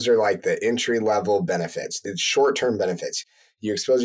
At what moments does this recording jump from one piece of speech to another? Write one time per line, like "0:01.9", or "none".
0:02.0